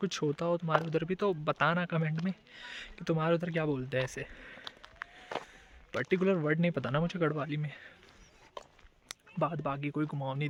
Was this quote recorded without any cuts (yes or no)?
yes